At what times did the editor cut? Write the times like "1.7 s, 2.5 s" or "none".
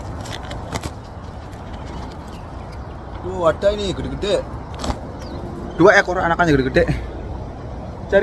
4.7 s